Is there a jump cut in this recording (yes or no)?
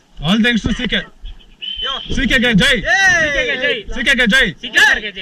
no